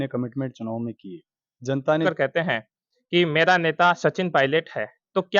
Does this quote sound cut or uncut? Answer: cut